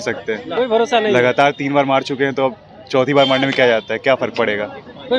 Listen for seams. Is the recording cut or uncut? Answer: uncut